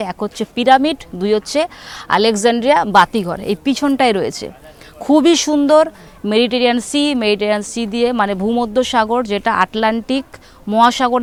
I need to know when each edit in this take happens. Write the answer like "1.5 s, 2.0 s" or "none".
none